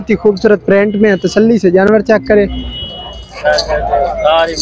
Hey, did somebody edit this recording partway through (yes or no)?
no